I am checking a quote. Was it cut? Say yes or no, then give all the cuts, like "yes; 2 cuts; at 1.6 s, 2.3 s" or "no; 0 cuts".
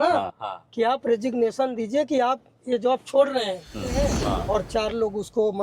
yes; 1 cut; at 4.1 s